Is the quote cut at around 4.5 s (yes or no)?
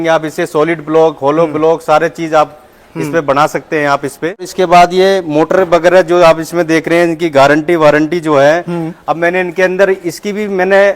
yes